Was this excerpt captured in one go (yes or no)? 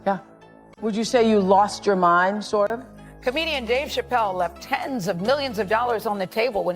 no